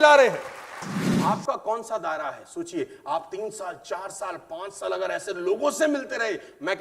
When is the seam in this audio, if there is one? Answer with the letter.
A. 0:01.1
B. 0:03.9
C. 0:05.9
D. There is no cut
A